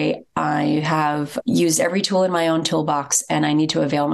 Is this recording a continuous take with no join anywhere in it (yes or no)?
no